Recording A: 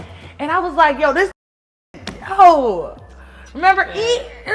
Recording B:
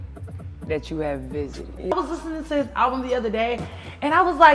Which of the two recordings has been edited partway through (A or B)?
B